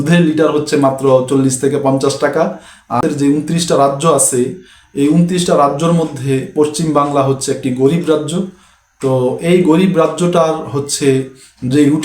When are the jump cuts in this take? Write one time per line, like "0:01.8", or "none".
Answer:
0:03.0